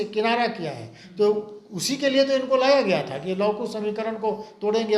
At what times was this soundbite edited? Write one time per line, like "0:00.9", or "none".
none